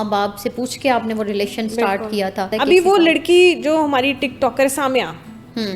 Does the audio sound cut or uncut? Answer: cut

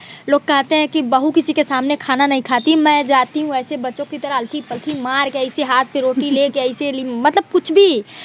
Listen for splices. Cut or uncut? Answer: uncut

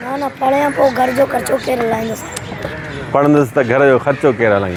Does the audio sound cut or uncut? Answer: uncut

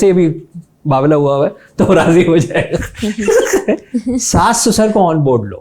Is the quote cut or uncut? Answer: uncut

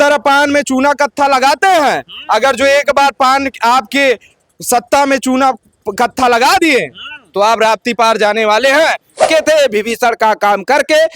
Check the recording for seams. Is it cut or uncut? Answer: cut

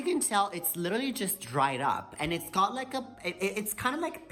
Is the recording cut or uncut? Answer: uncut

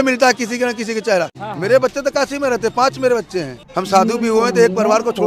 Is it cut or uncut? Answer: cut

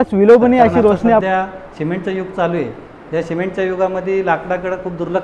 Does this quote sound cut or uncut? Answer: cut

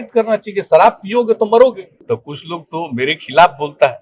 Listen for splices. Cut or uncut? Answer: cut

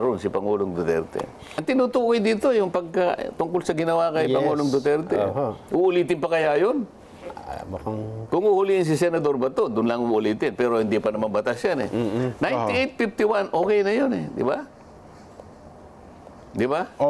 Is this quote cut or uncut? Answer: cut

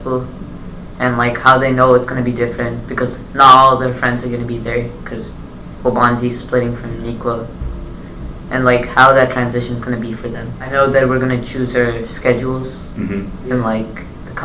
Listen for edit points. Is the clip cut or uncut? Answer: cut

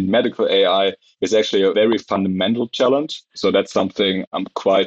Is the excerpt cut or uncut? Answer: cut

